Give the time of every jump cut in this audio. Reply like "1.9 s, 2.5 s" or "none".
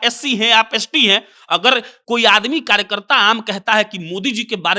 1.9 s